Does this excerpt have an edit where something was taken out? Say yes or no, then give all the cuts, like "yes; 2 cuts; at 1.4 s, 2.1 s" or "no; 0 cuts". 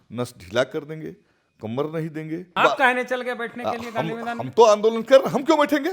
yes; 1 cut; at 2.5 s